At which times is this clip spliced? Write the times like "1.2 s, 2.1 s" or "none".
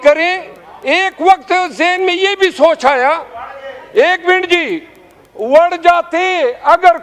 none